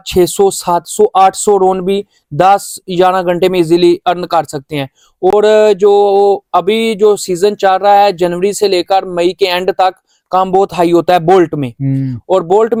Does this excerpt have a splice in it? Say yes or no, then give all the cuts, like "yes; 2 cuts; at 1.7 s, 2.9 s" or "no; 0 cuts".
no; 0 cuts